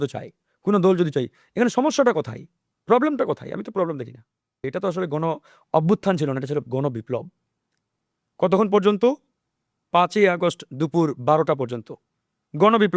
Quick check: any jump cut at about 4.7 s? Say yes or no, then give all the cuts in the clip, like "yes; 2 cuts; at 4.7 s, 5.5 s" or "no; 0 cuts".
yes; 1 cut; at 4.7 s